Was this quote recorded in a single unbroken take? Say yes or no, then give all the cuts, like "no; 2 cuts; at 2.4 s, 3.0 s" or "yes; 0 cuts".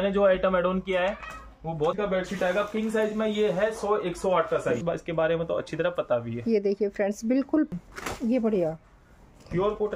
no; 3 cuts; at 1.9 s, 4.8 s, 7.7 s